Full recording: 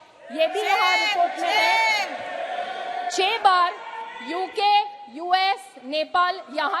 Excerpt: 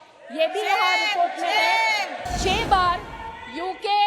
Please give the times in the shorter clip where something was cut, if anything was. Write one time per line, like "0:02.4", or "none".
0:02.2